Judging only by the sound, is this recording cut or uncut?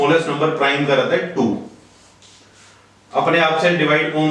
uncut